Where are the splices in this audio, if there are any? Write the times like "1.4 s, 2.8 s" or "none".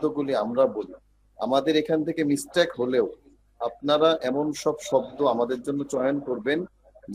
none